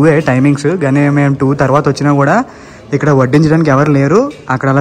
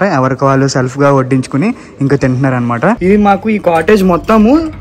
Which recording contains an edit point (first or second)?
second